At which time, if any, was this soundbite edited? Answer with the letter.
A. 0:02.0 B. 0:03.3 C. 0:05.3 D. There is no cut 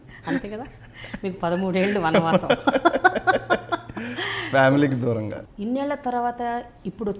C